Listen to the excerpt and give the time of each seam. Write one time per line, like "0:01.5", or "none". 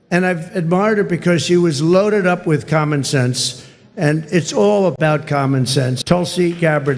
0:05.9